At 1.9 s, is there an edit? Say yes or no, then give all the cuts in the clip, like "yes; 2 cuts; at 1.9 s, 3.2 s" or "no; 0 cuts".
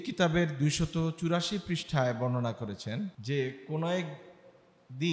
no; 1 cut; at 3.2 s